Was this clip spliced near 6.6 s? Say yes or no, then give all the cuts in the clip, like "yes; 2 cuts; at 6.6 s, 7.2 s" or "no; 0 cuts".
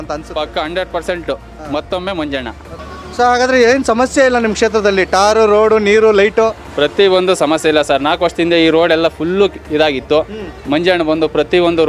no; 1 cut; at 2.8 s